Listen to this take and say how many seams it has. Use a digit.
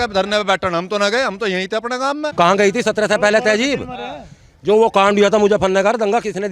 1